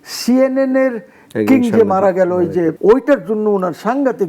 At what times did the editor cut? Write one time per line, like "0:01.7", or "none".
0:02.8